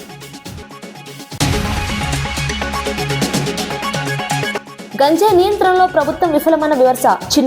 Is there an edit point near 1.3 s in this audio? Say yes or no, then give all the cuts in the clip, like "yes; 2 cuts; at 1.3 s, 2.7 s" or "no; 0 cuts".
yes; 1 cut; at 1.3 s